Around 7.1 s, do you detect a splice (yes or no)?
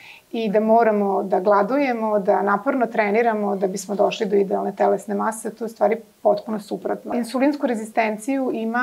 yes